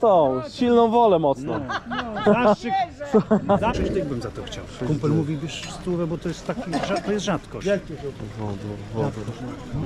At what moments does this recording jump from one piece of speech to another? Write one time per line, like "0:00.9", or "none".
0:03.7